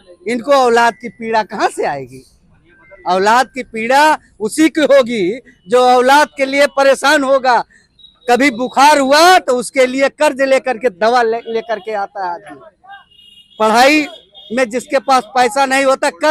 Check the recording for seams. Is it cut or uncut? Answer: uncut